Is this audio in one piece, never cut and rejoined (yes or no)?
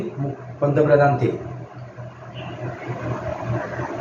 yes